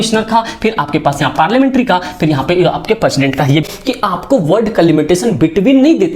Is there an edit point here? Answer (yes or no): yes